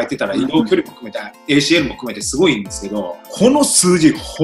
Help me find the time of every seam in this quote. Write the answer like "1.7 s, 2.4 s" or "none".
3.2 s